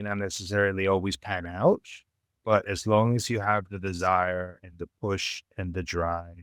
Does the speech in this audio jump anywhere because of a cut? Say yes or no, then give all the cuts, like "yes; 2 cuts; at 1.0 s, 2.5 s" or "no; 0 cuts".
yes; 1 cut; at 2.2 s